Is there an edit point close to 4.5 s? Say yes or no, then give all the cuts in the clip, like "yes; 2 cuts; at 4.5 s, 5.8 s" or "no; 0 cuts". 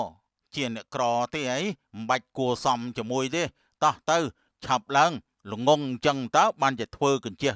yes; 1 cut; at 4.5 s